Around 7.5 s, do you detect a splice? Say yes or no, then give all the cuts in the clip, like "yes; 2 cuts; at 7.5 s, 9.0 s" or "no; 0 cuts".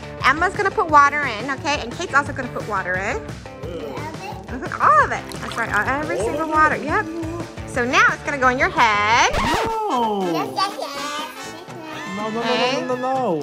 yes; 1 cut; at 7.5 s